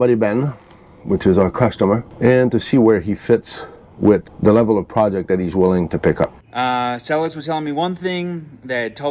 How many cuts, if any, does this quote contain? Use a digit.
3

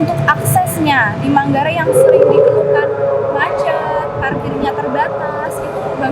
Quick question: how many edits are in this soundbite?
0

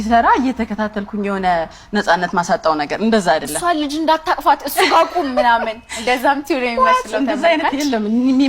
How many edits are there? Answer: 0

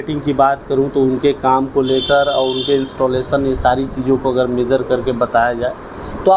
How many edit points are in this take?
0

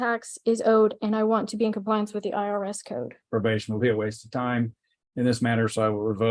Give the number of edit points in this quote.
1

